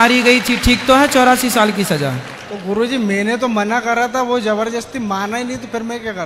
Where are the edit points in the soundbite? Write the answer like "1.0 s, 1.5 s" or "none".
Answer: none